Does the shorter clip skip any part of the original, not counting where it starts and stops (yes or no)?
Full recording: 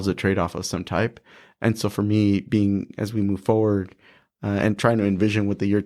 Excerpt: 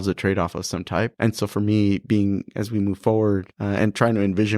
yes